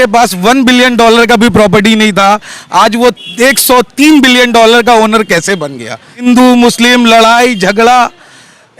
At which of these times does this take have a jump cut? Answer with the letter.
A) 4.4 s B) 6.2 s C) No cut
B